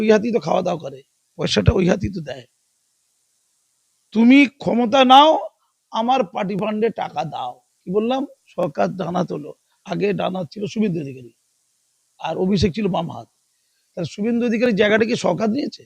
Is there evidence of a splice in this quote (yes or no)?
yes